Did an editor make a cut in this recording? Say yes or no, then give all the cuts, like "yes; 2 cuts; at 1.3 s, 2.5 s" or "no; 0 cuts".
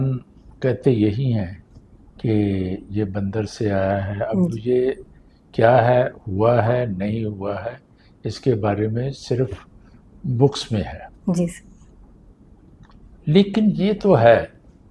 no; 0 cuts